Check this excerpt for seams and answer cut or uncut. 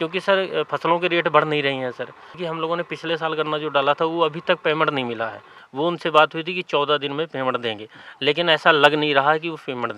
cut